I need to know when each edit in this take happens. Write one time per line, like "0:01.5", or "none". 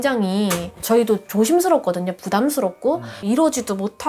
0:03.1